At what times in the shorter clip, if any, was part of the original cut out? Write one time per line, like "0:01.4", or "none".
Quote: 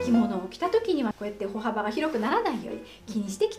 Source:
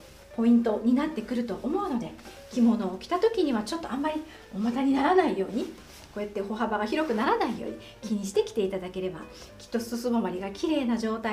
0:01.2